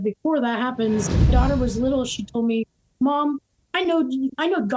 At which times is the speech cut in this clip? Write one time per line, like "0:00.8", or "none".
0:01.3